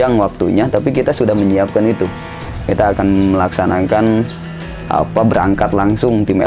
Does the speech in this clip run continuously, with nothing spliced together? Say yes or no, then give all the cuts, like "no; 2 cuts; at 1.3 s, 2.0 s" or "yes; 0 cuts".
yes; 0 cuts